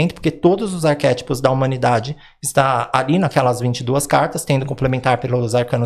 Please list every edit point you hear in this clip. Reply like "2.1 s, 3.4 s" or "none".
none